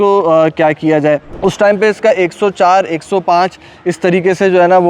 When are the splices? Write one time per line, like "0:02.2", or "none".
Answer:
0:01.3